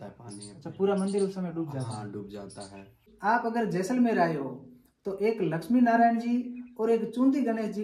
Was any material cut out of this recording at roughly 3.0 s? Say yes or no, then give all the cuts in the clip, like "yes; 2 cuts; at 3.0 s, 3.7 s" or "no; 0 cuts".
yes; 1 cut; at 3.0 s